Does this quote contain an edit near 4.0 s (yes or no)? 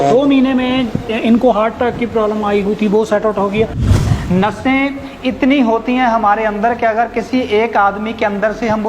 yes